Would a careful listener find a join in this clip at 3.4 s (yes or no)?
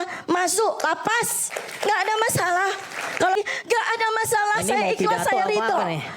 yes